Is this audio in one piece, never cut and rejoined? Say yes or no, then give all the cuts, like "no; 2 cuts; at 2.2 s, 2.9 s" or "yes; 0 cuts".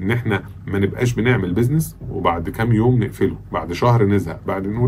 yes; 0 cuts